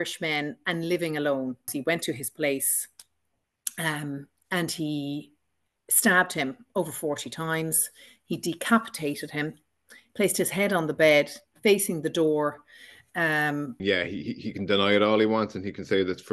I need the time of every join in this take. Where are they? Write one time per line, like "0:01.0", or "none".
0:01.7
0:13.8